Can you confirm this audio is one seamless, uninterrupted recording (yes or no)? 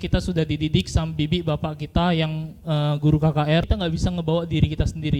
no